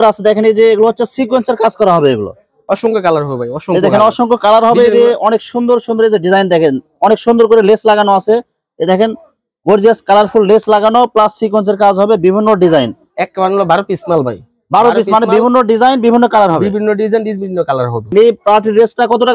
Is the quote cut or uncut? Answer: cut